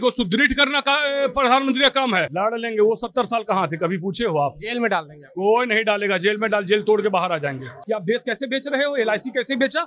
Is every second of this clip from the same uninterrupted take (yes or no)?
no